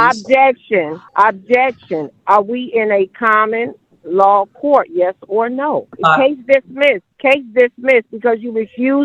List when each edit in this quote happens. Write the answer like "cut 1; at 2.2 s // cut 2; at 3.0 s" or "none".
cut 1; at 1.0 s // cut 2; at 5.9 s // cut 3; at 7.1 s